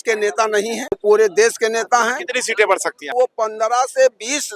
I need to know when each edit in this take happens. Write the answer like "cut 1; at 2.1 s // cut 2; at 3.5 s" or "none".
cut 1; at 1.0 s // cut 2; at 3.1 s